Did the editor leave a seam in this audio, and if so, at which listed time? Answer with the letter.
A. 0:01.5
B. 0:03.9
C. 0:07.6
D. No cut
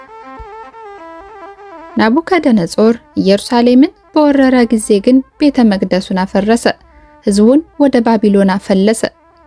A